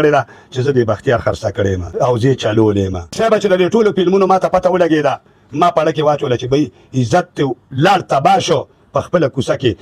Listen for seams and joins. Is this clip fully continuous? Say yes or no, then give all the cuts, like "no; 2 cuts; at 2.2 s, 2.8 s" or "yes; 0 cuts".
no; 2 cuts; at 1.8 s, 3.0 s